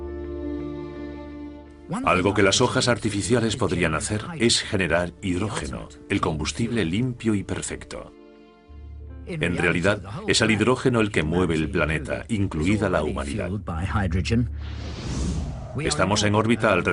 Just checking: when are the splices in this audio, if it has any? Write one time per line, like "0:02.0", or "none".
none